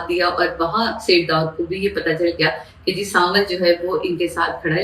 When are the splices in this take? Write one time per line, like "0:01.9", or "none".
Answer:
none